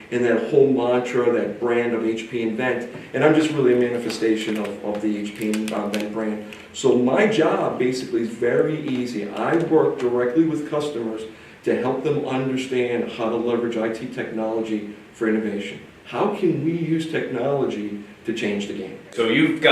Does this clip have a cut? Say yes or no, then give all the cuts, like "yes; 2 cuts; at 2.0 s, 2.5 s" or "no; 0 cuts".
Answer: yes; 1 cut; at 9.7 s